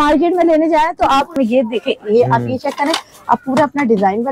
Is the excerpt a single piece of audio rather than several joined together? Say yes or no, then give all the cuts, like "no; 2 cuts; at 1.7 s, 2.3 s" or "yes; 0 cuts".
no; 1 cut; at 1.3 s